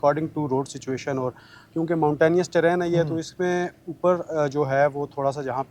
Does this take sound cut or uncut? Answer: uncut